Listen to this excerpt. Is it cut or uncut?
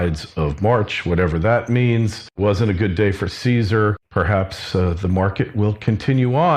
uncut